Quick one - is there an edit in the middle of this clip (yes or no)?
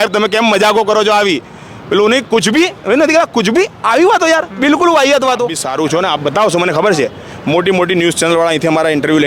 yes